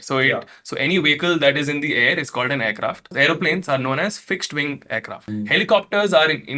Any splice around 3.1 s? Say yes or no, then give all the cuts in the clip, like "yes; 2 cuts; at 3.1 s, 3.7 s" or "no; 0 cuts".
yes; 2 cuts; at 3.1 s, 5.2 s